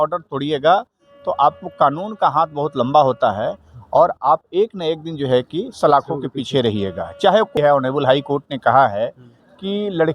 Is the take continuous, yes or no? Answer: no